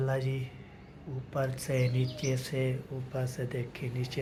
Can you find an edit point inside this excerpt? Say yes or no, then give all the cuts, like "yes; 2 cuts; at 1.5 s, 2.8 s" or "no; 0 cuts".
no; 0 cuts